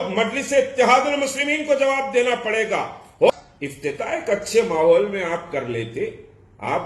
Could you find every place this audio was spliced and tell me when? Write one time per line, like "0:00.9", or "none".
0:03.3